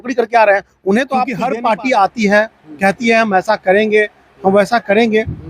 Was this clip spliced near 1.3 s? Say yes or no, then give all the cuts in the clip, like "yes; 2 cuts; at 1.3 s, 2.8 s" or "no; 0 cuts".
yes; 1 cut; at 1.3 s